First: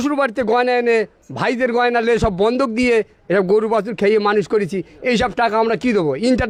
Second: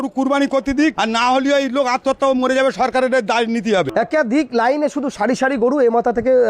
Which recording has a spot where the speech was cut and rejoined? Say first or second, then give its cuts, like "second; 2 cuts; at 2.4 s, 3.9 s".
second; 2 cuts; at 1.0 s, 3.9 s